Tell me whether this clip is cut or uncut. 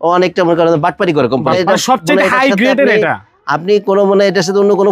cut